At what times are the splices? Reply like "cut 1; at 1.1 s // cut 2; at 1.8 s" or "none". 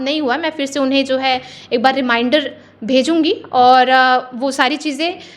none